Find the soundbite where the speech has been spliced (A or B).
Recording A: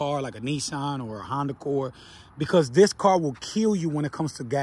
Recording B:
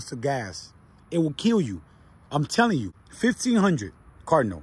B